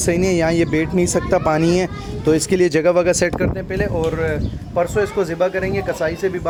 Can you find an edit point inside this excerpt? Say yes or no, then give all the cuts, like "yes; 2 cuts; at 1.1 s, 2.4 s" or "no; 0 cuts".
no; 0 cuts